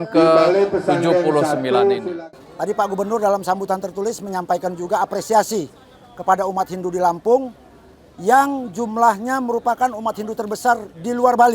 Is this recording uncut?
no; 1 cut; at 2.1 s

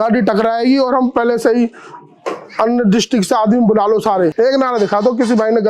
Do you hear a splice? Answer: yes; 1 cut; at 4.3 s

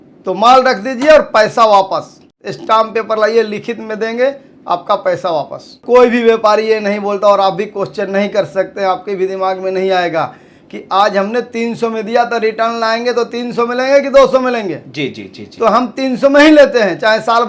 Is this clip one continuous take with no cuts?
no; 2 cuts; at 2.2 s, 5.8 s

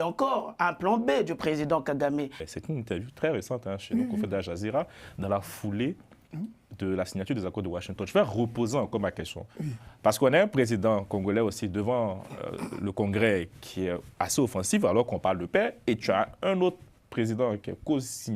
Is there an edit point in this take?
yes; 1 cut; at 2.4 s

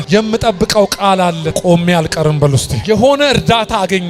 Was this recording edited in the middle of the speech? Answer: yes; 1 cut; at 1.5 s

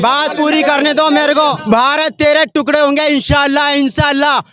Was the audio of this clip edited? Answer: yes; 1 cut; at 1.6 s

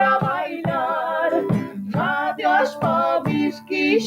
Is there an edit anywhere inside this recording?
no; 0 cuts

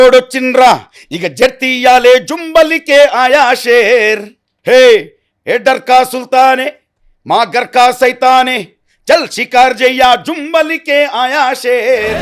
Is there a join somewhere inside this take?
no; 0 cuts

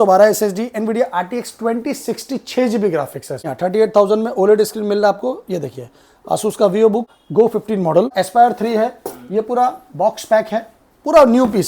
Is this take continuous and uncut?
no; 3 cuts; at 3.5 s, 7.2 s, 8.1 s

